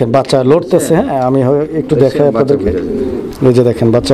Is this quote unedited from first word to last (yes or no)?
yes